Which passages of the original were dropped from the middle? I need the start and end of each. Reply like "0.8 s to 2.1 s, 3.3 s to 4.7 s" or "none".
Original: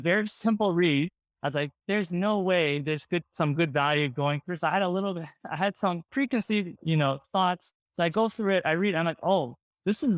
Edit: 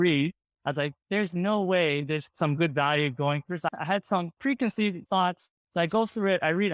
3.1 s to 3.3 s, 4.7 s to 5.4 s, 6.7 s to 7.2 s